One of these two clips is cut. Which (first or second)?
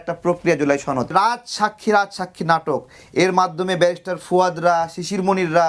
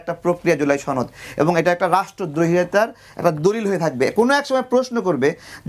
first